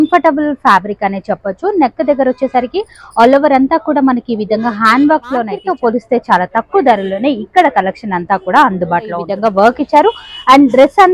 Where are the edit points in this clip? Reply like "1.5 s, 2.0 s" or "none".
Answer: 5.6 s, 9.3 s